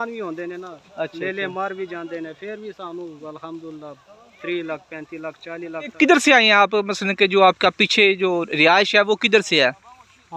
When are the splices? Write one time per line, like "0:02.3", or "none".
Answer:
0:05.9